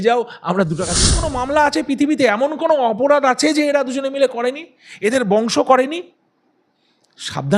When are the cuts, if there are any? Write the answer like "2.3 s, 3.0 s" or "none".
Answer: 1.2 s